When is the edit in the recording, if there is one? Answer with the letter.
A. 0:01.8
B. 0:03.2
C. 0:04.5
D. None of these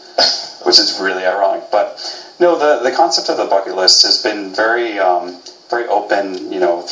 C